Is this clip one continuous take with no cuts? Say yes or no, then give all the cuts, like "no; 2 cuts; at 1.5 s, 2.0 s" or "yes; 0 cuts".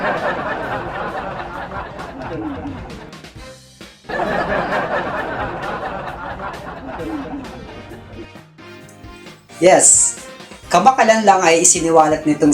yes; 0 cuts